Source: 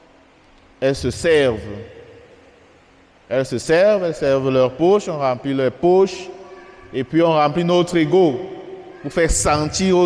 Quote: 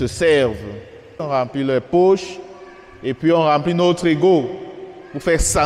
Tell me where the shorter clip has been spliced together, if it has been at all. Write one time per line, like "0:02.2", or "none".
0:01.2